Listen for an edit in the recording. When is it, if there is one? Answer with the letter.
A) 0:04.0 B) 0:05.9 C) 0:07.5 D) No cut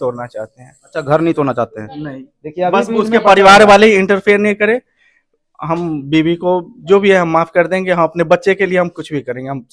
D